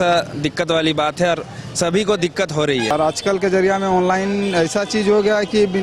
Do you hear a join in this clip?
yes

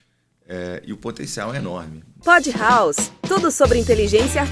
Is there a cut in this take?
yes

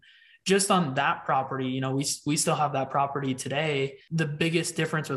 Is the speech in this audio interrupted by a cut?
yes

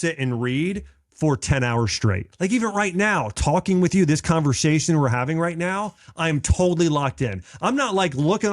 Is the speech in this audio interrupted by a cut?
yes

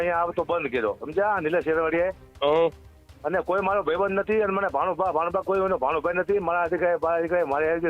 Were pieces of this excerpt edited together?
no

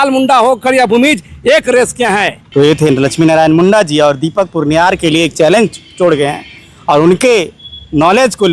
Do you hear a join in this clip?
yes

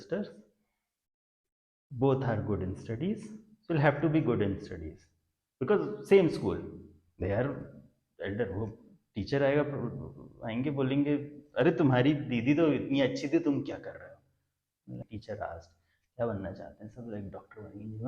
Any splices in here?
yes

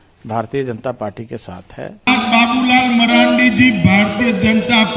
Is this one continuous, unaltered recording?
no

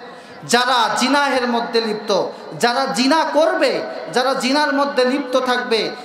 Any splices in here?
no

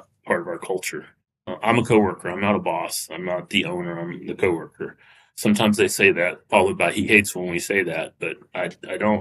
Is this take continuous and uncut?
yes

